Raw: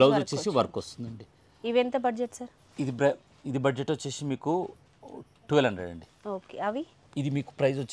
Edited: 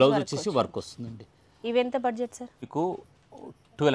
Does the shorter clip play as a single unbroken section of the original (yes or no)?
no